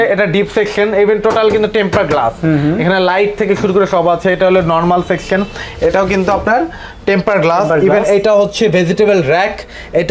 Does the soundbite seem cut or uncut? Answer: uncut